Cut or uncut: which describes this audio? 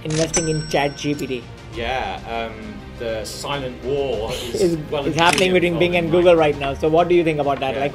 uncut